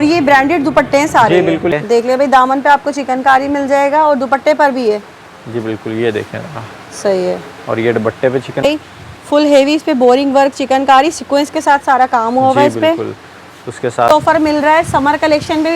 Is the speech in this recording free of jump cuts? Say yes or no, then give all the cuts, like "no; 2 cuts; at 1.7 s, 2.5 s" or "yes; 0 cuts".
no; 3 cuts; at 1.7 s, 8.6 s, 14.1 s